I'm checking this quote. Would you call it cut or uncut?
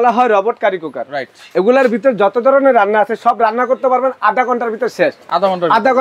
uncut